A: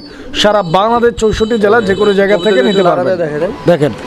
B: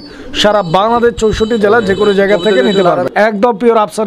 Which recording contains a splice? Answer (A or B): B